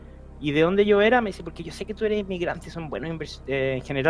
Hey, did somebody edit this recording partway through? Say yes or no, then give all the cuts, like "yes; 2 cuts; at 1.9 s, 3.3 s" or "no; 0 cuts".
no; 0 cuts